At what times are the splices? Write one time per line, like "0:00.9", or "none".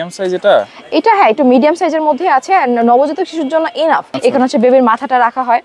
0:04.1